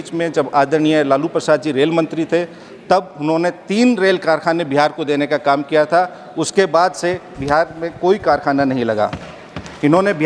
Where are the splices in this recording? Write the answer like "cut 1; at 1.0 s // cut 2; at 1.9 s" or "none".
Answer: none